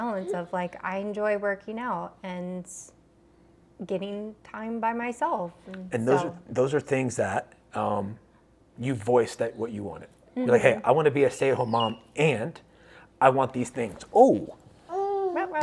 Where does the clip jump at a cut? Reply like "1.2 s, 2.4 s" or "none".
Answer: none